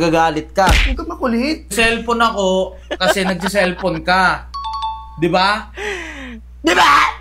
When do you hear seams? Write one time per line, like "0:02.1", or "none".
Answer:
0:01.7